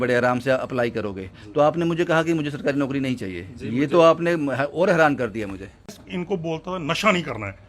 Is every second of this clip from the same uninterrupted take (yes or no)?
no